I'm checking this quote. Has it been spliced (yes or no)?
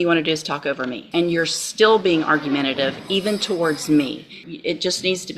yes